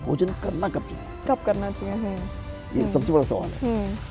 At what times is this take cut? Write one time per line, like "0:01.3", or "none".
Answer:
none